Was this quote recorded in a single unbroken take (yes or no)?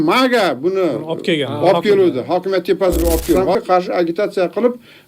no